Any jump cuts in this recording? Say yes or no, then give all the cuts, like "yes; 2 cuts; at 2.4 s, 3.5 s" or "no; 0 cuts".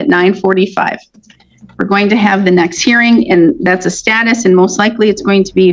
no; 0 cuts